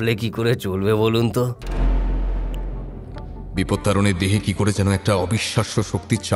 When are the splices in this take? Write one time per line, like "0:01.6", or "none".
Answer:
0:03.5